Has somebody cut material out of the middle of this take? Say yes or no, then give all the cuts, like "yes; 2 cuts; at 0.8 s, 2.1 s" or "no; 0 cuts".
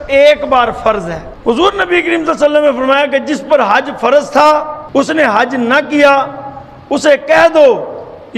yes; 2 cuts; at 1.2 s, 4.8 s